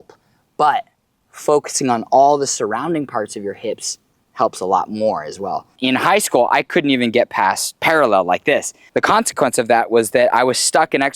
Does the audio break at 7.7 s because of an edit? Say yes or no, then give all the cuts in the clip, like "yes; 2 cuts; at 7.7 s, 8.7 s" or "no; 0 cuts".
yes; 3 cuts; at 5.7 s, 7.7 s, 8.8 s